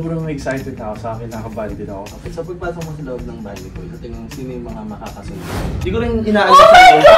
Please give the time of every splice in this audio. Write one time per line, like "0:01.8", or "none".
0:02.1
0:05.7